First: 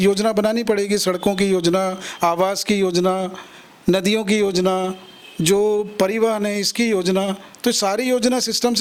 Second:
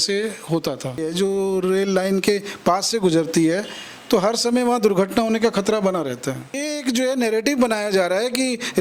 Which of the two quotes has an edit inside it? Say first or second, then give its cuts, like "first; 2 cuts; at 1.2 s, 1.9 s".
second; 2 cuts; at 1.1 s, 6.7 s